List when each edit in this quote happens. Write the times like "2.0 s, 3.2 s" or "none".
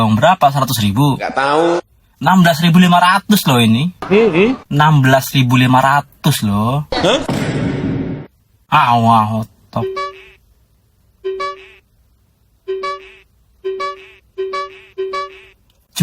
none